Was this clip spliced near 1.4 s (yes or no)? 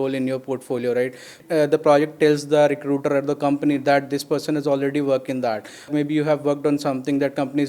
yes